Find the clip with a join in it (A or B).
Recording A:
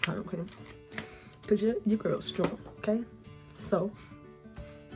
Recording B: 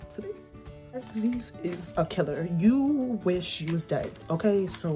B